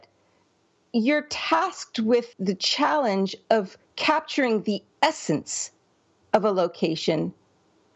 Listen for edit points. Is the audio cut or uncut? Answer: cut